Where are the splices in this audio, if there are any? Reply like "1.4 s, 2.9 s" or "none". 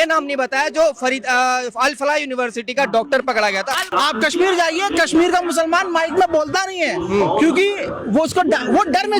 3.9 s